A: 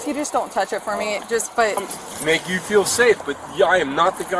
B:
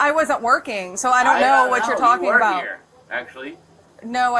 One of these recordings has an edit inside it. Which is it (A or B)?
A